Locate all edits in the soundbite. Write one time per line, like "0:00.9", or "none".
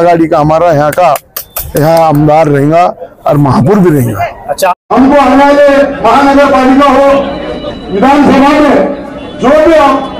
0:04.8